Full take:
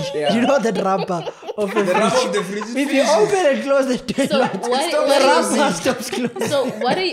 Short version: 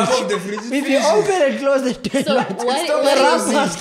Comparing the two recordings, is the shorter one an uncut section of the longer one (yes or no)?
yes